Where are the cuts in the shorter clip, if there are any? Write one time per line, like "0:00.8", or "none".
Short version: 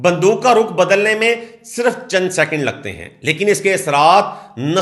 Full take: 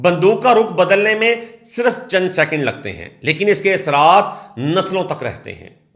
none